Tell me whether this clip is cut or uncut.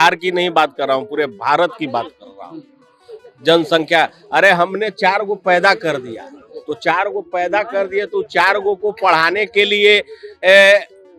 uncut